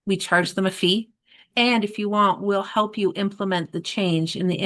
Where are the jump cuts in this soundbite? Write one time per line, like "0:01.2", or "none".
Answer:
0:01.5